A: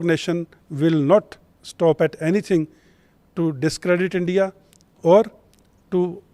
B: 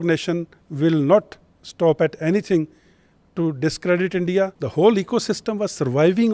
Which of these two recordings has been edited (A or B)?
B